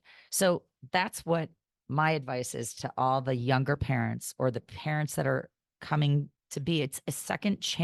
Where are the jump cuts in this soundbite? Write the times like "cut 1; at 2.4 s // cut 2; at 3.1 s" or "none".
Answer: none